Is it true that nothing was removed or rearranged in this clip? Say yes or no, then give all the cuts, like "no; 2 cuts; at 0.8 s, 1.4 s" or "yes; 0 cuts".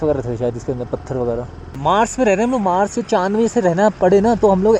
no; 1 cut; at 1.8 s